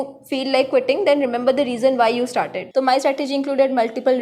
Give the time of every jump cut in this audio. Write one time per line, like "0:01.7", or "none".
0:02.6